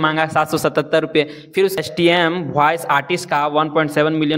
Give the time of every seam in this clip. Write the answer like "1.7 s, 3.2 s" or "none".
1.8 s